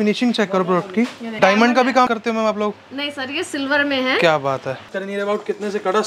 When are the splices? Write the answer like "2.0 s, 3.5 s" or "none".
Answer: 1.4 s, 5.0 s